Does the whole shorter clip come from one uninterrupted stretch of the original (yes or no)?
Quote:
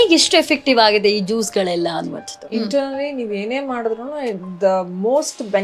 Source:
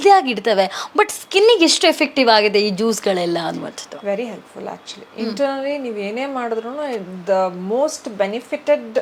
no